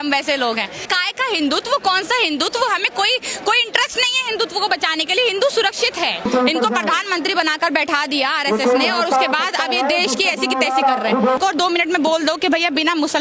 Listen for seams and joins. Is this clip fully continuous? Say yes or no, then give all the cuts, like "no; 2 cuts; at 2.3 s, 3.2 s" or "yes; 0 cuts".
no; 3 cuts; at 0.9 s, 6.3 s, 11.4 s